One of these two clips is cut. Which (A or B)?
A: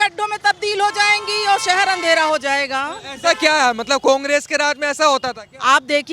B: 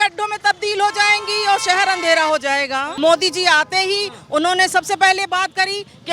B